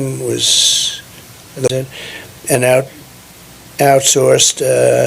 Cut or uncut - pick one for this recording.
cut